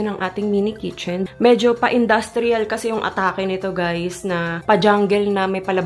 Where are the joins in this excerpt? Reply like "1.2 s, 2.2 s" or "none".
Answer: 1.1 s, 4.5 s